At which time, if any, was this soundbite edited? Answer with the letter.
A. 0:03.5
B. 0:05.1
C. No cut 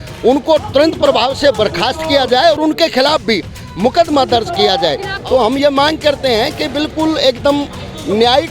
B